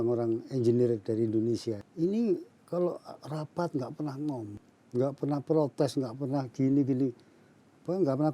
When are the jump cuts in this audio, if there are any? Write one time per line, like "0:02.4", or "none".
0:01.9
0:04.6